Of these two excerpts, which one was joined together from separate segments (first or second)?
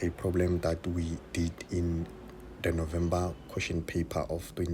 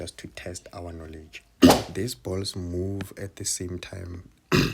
second